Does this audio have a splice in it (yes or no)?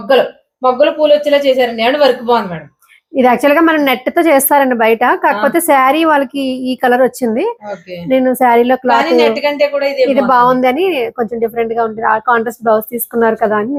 no